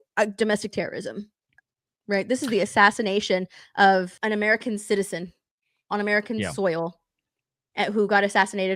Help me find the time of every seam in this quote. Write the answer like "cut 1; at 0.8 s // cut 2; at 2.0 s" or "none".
cut 1; at 4.1 s